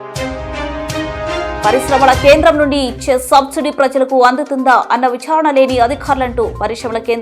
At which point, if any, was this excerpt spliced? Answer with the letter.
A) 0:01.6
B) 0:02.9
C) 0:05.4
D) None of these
A